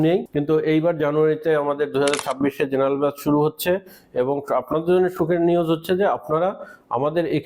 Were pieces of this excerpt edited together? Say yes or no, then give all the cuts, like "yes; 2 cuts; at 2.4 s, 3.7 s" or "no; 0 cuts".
no; 0 cuts